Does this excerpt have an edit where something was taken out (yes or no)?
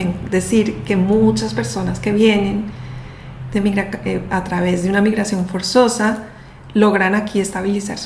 no